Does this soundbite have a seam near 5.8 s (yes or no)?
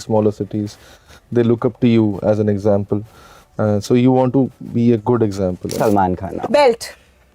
yes